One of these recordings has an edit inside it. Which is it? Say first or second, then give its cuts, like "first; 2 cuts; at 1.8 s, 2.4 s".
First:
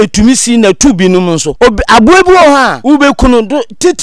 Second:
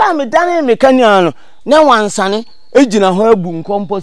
first; 2 cuts; at 1.5 s, 2.8 s